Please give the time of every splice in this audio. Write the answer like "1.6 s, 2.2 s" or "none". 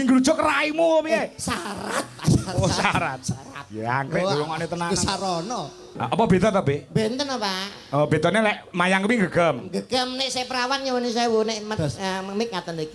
6.0 s